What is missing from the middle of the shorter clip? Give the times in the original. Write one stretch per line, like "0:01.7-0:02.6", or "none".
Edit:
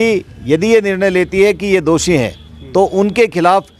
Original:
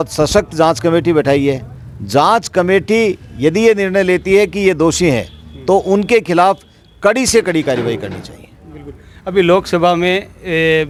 none

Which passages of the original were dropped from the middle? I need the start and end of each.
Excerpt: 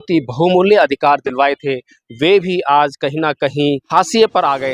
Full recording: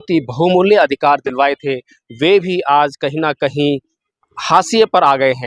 0:03.8-0:04.4

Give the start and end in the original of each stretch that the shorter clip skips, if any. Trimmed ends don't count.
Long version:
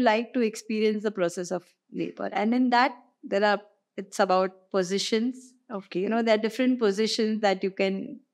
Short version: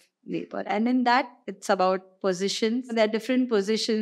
0:03.1-0:03.9
0:05.4-0:06.2

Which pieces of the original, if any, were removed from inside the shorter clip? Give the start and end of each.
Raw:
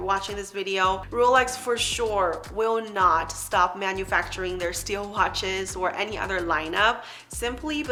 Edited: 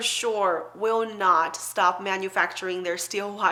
none

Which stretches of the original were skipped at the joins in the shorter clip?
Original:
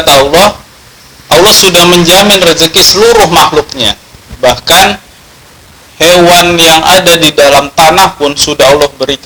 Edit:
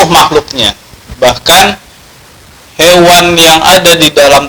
none

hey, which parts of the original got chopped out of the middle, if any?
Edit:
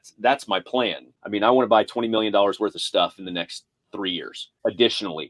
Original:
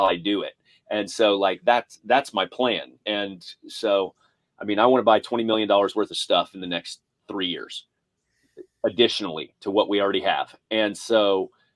0:02.9-0:04.4
0:07.8-0:08.6

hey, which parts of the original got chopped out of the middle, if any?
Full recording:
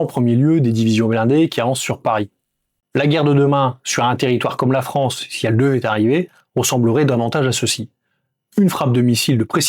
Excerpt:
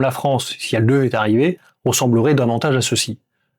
none

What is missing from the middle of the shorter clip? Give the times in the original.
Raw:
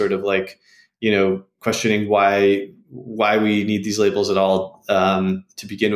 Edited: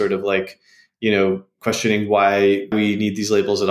0:02.7-0:03.4

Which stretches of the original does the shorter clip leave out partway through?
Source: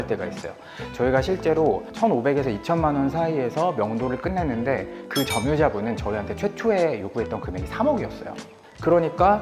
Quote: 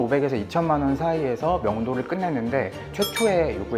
0:05.0-0:06.3

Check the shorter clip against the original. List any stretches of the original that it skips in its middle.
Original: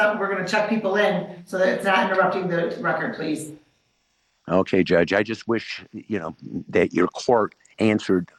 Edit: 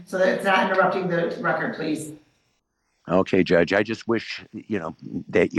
none

